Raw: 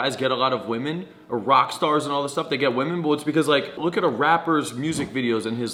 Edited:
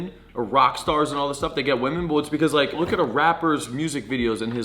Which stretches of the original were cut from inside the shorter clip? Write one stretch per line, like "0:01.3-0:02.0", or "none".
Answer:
0:03.7-0:03.8